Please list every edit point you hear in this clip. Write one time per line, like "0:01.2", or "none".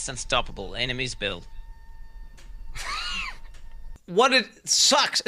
0:03.9